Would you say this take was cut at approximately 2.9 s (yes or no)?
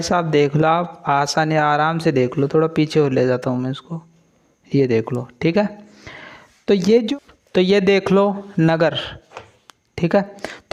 no